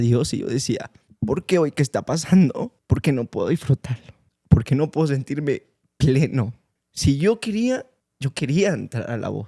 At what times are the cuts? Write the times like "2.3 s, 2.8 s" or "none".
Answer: none